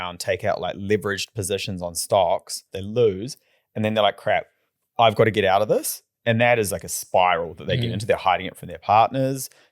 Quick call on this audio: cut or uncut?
cut